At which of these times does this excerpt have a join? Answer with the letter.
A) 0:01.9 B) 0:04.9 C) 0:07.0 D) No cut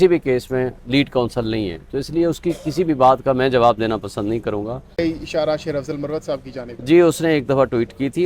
B